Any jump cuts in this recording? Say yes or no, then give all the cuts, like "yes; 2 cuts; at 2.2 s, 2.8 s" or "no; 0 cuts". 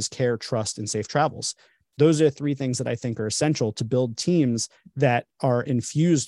no; 0 cuts